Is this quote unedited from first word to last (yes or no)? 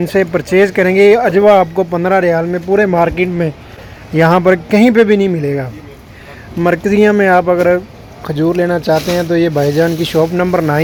yes